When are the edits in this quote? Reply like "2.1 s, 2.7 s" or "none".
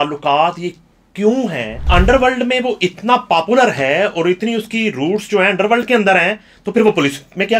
1.9 s